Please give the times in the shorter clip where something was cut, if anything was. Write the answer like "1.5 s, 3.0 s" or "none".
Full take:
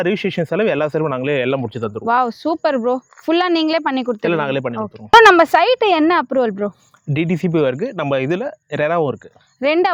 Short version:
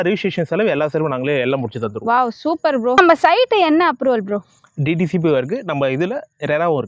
3.0 s